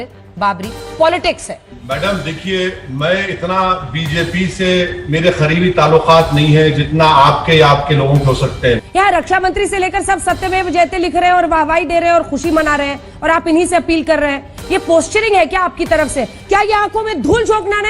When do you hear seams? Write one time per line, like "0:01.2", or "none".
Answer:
0:01.7
0:08.8
0:16.4